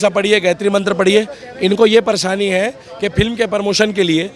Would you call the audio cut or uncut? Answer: uncut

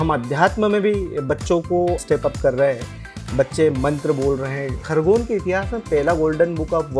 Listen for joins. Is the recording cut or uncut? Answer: cut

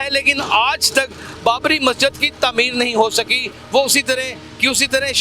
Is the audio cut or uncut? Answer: uncut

